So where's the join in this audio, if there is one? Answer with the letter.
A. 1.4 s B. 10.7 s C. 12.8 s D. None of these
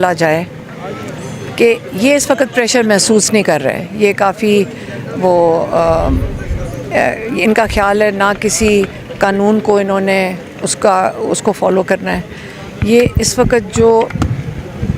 D